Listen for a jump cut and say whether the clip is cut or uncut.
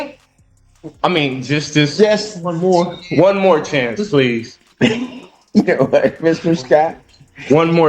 cut